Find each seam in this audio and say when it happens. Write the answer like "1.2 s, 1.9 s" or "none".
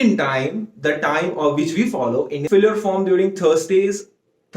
2.4 s